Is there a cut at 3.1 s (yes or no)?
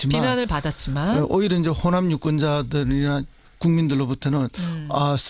yes